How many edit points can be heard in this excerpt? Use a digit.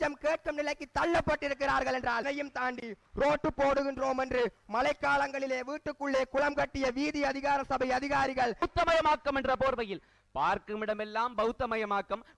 2